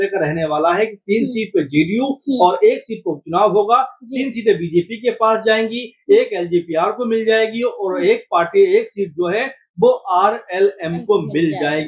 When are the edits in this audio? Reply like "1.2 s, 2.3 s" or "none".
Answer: none